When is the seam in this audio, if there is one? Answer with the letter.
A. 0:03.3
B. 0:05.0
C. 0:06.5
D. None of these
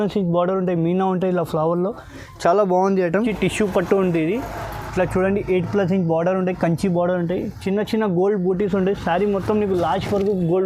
A